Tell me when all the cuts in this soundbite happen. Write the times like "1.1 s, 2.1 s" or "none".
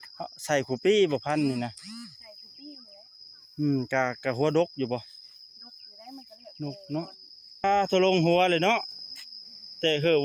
7.6 s